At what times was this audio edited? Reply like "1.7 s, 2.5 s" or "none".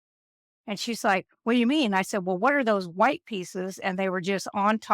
none